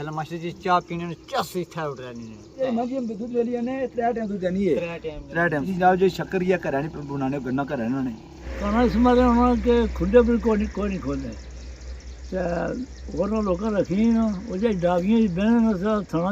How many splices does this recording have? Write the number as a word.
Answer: three